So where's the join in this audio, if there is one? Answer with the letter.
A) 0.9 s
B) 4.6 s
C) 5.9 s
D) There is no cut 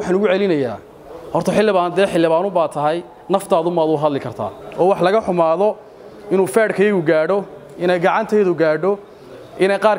B